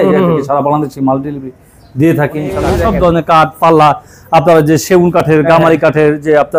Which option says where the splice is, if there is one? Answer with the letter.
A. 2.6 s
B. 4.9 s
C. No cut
A